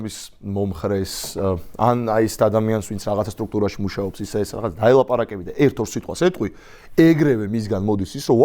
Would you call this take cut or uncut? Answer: uncut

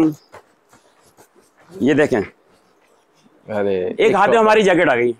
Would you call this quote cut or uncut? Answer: cut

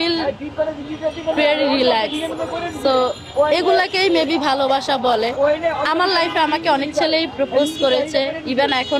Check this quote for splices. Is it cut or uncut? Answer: uncut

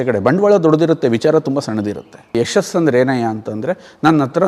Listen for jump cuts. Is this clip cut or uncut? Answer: cut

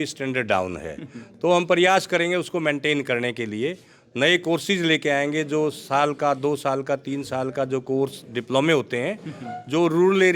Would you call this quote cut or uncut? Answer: uncut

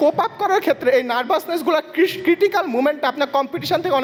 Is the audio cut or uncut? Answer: uncut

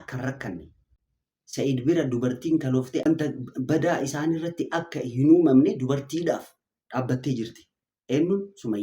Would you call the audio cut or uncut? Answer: cut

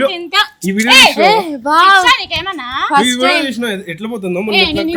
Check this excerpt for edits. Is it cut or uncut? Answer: uncut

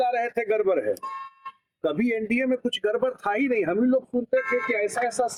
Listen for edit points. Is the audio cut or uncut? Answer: uncut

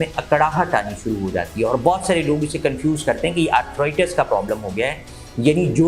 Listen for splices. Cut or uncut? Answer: uncut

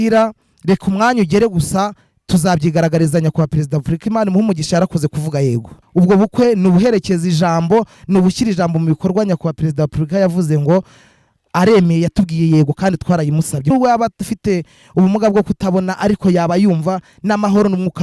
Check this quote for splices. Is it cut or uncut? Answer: cut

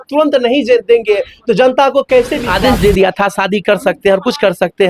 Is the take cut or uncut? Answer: cut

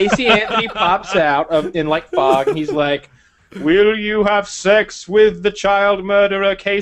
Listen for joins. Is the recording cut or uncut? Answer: uncut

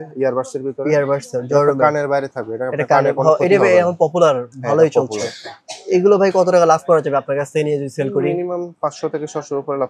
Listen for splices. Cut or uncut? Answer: uncut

